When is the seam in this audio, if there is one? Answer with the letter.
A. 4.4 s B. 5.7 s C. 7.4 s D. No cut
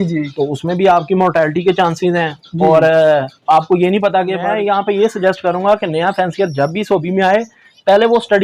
A